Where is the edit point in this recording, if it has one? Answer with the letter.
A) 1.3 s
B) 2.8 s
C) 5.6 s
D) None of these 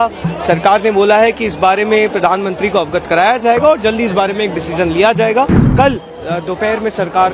C